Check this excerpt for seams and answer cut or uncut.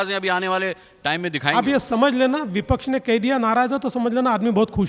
uncut